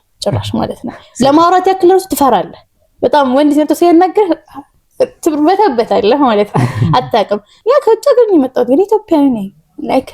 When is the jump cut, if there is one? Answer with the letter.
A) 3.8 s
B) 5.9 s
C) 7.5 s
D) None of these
C